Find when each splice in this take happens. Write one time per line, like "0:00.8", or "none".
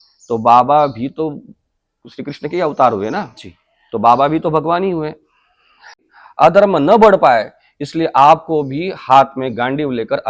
0:06.0